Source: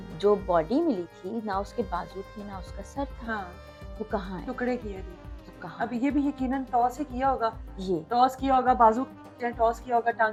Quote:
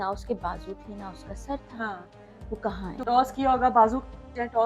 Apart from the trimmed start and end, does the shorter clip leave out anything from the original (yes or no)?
yes